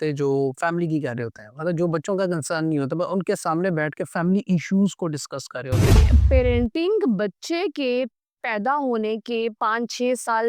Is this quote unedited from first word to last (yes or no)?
no